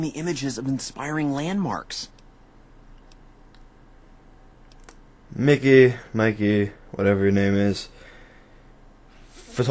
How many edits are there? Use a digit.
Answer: 1